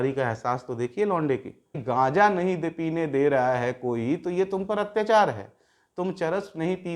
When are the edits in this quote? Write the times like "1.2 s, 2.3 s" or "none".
1.8 s